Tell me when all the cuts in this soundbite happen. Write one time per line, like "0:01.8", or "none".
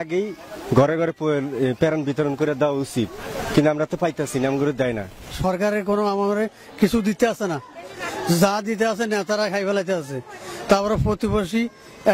none